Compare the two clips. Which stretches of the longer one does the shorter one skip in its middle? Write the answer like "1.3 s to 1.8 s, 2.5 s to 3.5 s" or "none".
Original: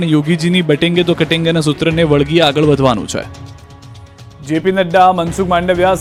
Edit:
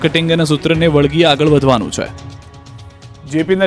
none